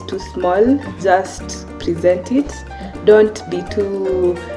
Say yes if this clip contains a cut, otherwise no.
no